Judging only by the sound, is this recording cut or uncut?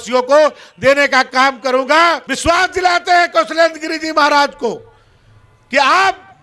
cut